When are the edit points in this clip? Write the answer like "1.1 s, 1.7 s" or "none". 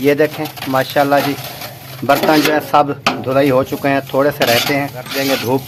none